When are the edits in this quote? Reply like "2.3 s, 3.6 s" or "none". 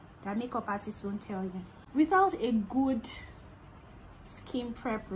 1.8 s

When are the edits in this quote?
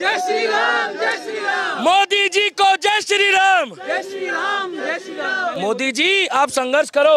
none

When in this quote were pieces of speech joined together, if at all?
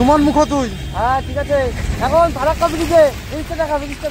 none

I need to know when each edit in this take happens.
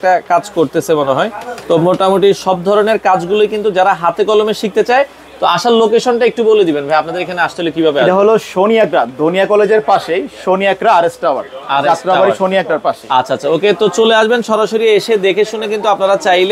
none

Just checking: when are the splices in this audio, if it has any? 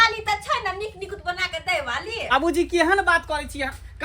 2.6 s

